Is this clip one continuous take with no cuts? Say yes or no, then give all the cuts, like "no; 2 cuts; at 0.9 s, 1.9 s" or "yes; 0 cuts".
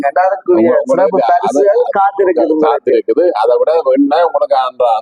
yes; 0 cuts